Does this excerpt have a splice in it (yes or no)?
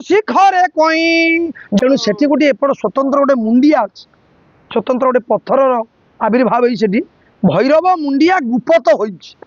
yes